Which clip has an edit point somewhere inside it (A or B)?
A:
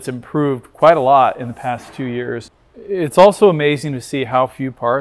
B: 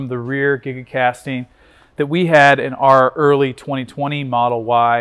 A